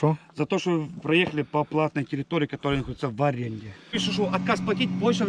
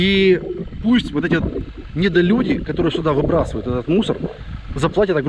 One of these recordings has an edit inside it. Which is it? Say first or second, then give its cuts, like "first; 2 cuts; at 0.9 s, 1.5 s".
first; 1 cut; at 3.9 s